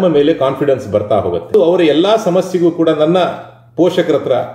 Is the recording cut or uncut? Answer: cut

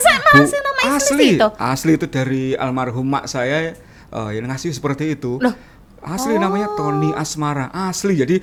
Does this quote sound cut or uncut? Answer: uncut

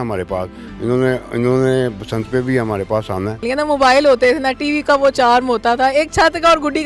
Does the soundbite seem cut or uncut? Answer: cut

